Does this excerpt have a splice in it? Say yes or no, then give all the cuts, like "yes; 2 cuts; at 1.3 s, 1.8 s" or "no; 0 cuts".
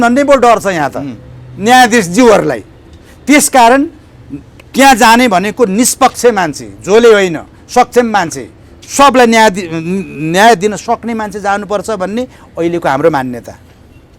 no; 0 cuts